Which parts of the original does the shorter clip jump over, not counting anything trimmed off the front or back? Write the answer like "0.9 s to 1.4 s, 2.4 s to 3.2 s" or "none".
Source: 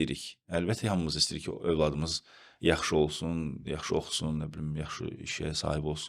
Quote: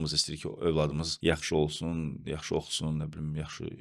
2.1 s to 2.5 s

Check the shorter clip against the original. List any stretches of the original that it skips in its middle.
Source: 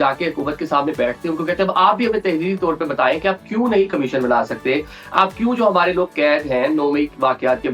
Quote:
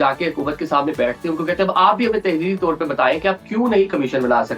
none

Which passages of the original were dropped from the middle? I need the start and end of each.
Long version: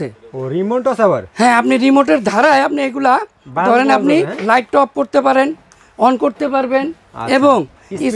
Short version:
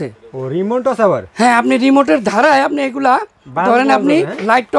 none

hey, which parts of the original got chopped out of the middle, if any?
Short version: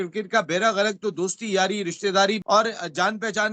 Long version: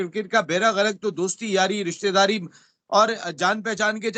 2.4 s to 2.8 s

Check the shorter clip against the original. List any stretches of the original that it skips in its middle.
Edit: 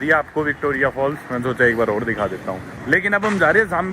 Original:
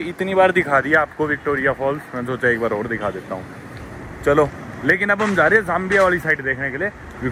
3.5 s to 4.7 s

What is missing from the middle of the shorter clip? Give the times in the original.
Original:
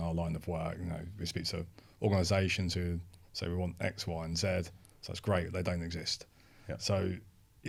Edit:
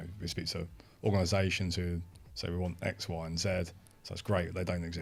none

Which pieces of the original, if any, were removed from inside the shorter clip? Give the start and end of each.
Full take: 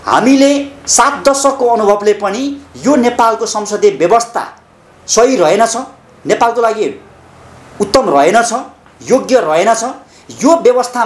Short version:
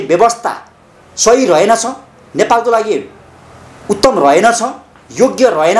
none

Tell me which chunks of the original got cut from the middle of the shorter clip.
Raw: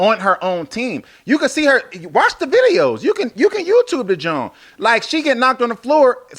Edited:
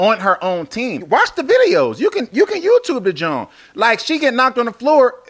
1.0 s to 2.0 s

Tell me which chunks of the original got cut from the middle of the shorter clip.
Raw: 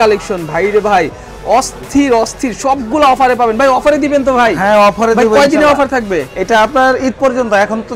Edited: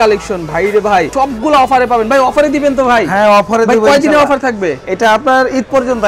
1.1 s to 2.6 s

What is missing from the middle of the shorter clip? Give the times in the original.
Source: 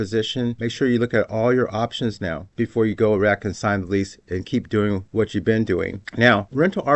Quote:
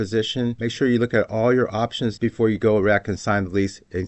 2.1 s to 2.5 s

